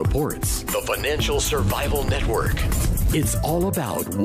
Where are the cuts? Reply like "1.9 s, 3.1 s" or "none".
none